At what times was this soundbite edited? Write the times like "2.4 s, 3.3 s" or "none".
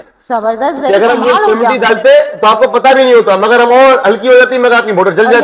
none